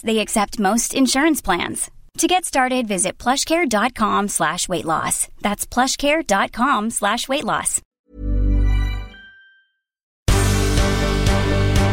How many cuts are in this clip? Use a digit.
2